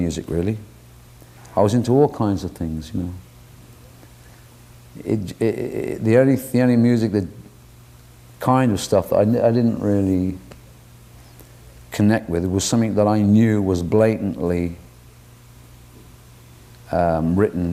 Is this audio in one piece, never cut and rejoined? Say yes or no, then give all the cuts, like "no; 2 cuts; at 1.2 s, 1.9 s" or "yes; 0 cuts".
yes; 0 cuts